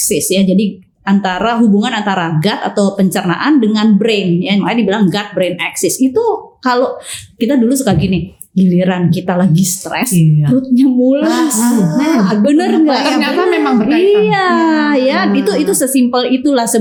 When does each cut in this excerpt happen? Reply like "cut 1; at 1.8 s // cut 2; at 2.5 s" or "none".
none